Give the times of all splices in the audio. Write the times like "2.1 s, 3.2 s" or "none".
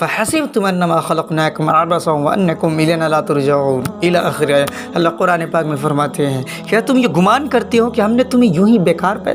none

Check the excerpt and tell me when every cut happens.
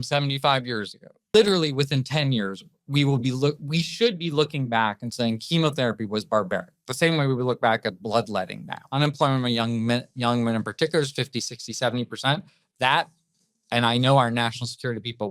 1.1 s, 8.8 s

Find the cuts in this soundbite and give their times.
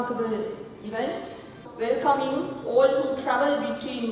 1.6 s

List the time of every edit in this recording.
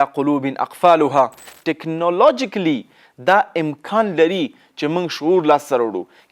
1.5 s

